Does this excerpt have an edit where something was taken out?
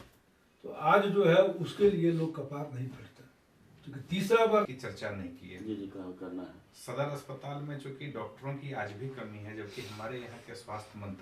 yes; 1 cut; at 4.7 s

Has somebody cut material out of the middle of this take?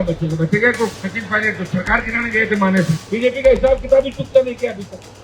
yes; 2 cuts; at 1.0 s, 3.0 s

